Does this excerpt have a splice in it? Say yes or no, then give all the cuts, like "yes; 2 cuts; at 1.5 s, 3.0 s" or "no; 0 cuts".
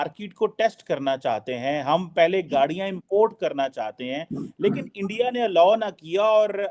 no; 0 cuts